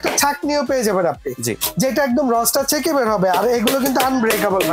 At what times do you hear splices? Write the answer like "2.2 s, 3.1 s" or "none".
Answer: none